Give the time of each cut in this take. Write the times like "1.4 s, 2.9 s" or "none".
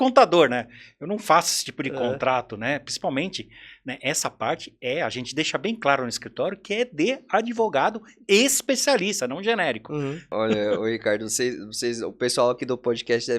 10.2 s

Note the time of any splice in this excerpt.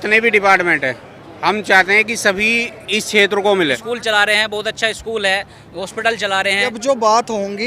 3.8 s, 6.8 s

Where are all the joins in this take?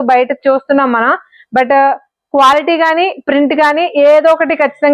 none

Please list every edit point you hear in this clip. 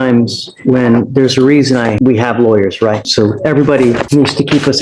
2.0 s, 3.0 s, 4.0 s

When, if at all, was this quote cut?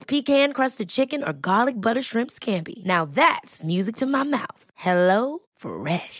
none

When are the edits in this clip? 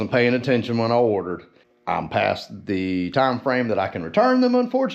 1.5 s

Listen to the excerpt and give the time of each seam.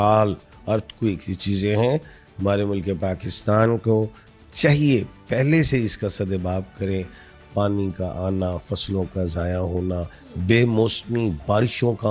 none

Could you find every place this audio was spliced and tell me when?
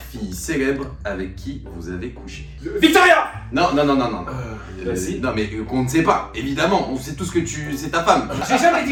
none

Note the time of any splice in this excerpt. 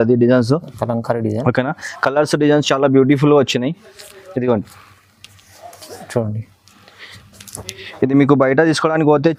none

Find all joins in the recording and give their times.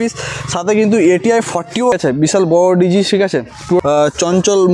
1.9 s, 3.8 s

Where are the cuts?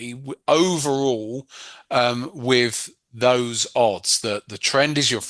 none

